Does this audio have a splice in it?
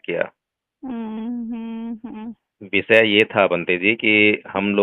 no; 0 cuts

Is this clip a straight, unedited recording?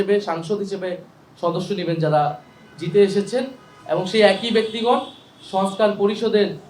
yes; 0 cuts

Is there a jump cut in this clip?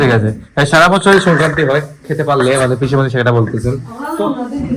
no; 0 cuts

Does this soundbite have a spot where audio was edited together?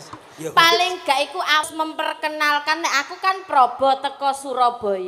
yes; 1 cut; at 1.6 s

